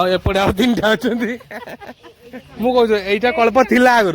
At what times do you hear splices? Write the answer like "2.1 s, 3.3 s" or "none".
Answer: 2.5 s